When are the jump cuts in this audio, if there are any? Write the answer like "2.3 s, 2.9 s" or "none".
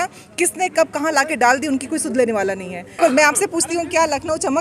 3.0 s